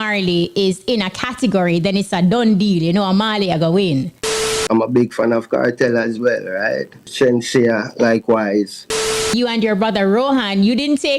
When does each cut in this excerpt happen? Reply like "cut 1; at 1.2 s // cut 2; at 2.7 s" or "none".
cut 1; at 4.6 s // cut 2; at 7.0 s // cut 3; at 9.3 s